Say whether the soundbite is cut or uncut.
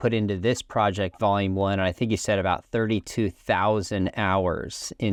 uncut